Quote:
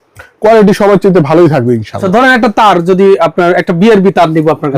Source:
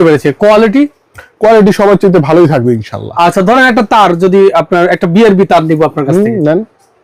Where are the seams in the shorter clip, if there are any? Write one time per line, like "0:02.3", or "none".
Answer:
0:02.0